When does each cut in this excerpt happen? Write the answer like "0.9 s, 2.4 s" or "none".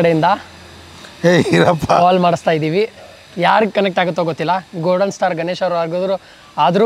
none

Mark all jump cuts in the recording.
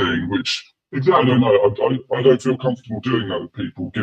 none

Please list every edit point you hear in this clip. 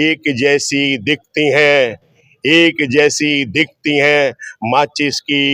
none

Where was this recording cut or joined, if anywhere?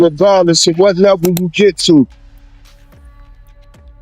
none

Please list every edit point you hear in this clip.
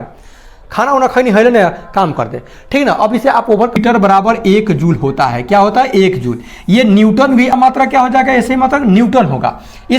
3.8 s, 7.5 s

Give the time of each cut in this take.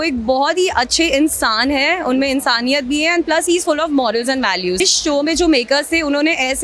4.8 s

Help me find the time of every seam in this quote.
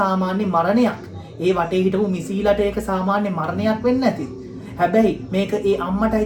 none

